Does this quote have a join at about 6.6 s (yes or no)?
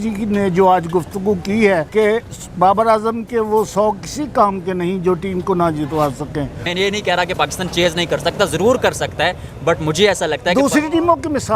yes